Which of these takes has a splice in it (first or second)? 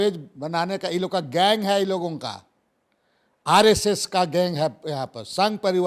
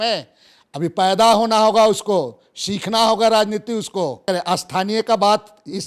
second